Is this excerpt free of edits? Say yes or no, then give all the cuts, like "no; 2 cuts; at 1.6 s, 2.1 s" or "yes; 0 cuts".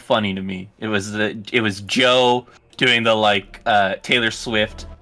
yes; 0 cuts